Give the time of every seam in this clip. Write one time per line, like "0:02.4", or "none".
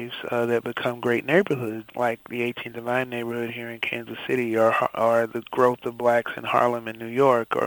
0:01.8